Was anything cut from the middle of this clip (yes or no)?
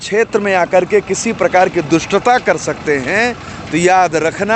no